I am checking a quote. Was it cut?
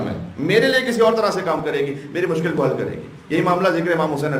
no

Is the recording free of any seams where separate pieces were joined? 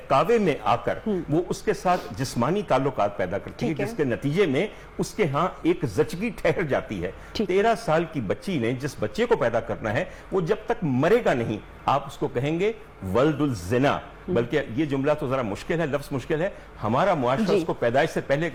yes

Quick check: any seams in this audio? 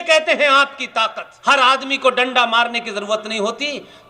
yes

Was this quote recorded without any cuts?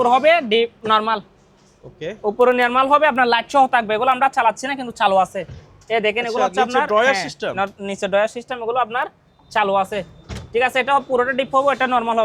yes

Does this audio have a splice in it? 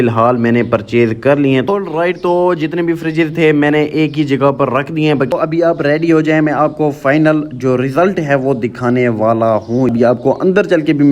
yes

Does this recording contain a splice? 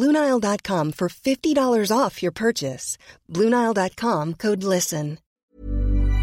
yes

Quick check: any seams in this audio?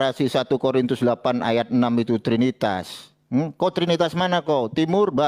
no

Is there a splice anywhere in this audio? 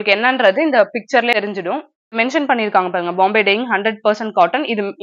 yes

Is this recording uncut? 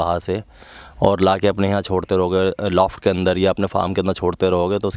yes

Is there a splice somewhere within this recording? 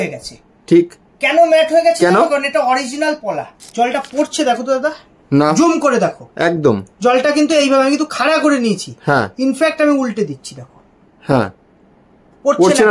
yes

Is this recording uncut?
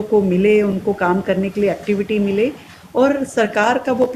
yes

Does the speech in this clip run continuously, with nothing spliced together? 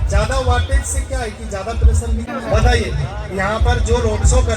no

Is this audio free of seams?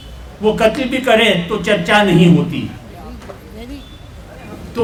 yes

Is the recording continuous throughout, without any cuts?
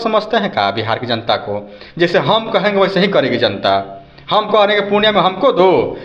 yes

